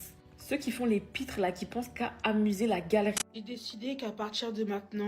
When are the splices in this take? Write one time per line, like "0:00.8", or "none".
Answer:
0:03.2